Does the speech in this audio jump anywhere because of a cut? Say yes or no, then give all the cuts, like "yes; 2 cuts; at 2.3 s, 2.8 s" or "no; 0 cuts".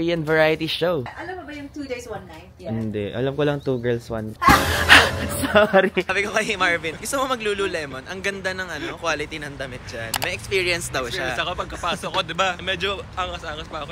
yes; 2 cuts; at 2.5 s, 6.1 s